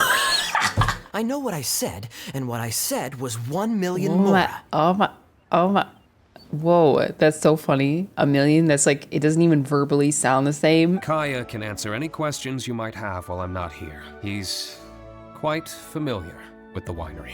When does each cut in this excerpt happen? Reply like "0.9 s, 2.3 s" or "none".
1.0 s, 11.0 s, 14.1 s